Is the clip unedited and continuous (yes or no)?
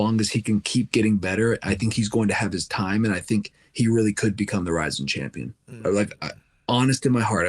yes